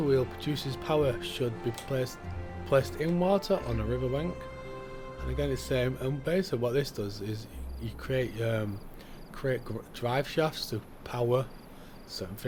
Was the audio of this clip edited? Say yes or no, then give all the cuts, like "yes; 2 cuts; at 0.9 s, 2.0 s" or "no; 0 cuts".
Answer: no; 0 cuts